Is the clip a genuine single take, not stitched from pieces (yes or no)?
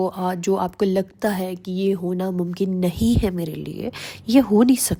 yes